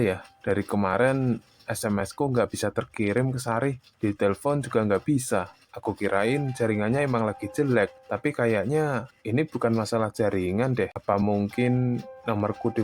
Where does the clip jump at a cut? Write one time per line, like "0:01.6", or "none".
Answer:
0:11.0